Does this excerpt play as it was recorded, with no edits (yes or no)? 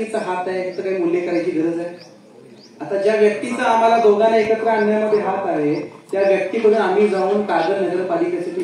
yes